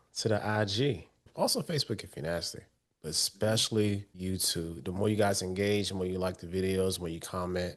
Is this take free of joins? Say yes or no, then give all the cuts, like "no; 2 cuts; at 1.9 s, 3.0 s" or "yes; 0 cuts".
no; 2 cuts; at 1.3 s, 4.1 s